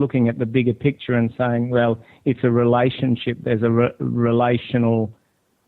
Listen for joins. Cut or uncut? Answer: uncut